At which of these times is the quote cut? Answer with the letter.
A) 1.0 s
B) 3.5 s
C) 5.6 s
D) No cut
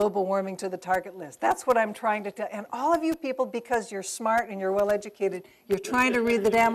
B